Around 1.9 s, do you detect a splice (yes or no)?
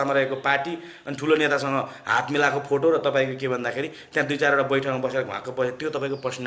no